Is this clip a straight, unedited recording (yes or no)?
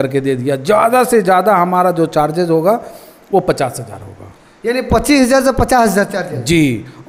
yes